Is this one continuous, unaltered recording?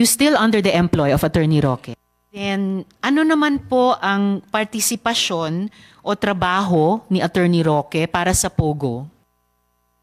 no; 1 cut; at 2.4 s

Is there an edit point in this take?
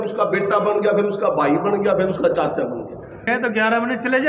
yes; 1 cut; at 3.3 s

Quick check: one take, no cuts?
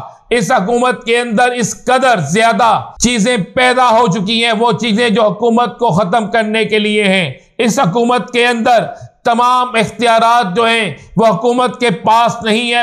no; 1 cut; at 2.9 s

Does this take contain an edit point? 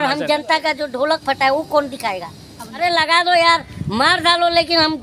yes; 1 cut; at 2.8 s

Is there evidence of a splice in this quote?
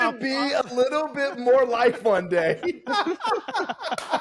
no; 0 cuts

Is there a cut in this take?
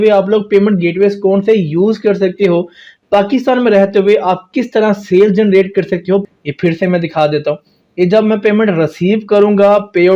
yes; 1 cut; at 6.3 s

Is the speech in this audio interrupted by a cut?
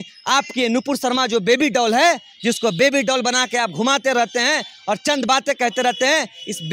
no; 0 cuts

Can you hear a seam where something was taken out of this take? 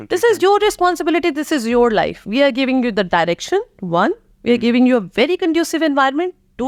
no; 0 cuts

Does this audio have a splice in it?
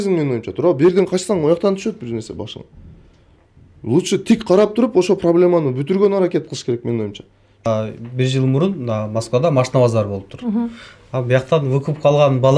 yes; 1 cut; at 7.5 s

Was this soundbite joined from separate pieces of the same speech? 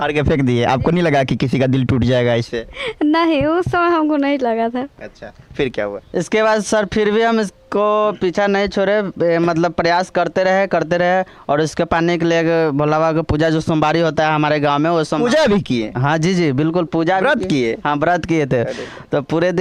no; 0 cuts

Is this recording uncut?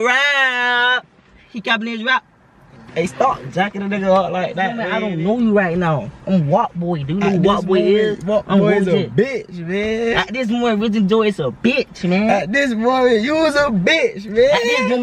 no; 1 cut; at 4.9 s

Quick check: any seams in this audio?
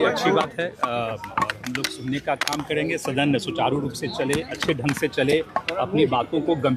no; 0 cuts

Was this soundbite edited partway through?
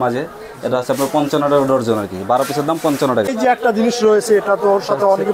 yes; 1 cut; at 3.4 s

